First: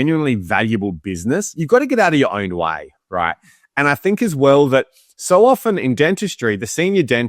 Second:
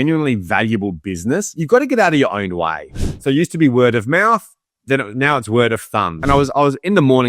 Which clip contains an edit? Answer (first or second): second